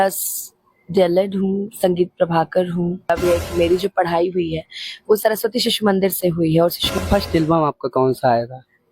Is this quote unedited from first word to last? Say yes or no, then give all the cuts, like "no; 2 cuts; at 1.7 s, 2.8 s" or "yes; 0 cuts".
no; 2 cuts; at 3.1 s, 6.8 s